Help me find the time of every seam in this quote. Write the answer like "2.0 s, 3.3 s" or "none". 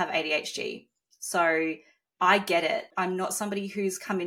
2.9 s